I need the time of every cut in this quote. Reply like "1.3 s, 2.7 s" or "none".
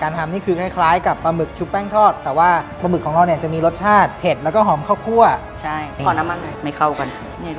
2.8 s, 5.9 s